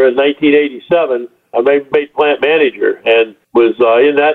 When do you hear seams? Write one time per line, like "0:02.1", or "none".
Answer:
0:01.8
0:03.4